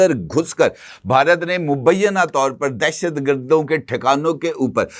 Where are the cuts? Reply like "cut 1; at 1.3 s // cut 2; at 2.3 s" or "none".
none